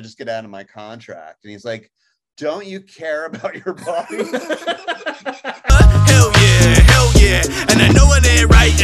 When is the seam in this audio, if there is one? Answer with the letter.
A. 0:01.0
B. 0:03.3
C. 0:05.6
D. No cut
C